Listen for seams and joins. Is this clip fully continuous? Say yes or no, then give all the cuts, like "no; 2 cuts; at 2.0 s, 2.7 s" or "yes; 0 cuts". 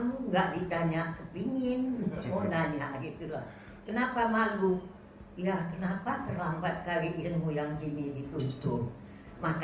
yes; 0 cuts